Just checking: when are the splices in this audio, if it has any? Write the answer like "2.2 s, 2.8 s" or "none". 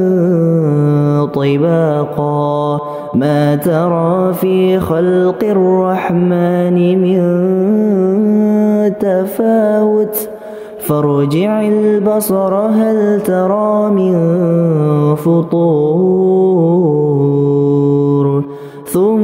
none